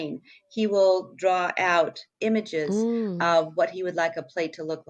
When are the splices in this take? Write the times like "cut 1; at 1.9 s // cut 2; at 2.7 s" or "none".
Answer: none